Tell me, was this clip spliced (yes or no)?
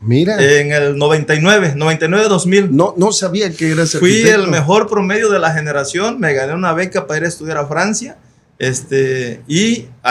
no